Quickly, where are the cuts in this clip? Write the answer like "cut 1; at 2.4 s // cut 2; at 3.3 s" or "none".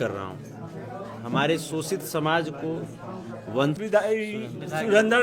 cut 1; at 3.8 s